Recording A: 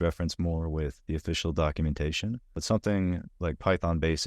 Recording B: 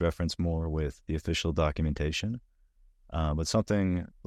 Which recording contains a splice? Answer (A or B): A